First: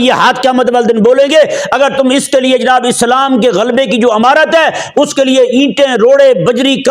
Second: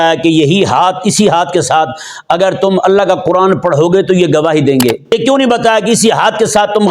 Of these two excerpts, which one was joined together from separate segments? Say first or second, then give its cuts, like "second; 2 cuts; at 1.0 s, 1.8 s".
second; 1 cut; at 5.1 s